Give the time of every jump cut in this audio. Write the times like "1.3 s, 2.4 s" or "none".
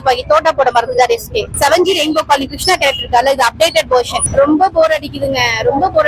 1.4 s, 4.2 s